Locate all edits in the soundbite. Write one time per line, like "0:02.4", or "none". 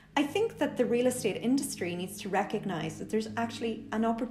none